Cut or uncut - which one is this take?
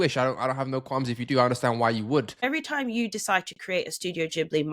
cut